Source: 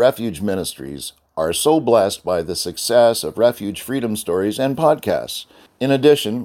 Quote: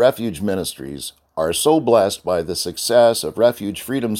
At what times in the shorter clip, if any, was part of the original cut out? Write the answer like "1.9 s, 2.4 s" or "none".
none